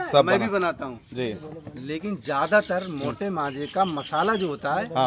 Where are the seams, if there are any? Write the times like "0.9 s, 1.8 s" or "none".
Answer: none